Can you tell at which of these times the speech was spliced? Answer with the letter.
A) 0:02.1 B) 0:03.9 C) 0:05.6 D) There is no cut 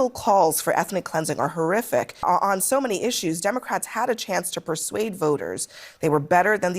A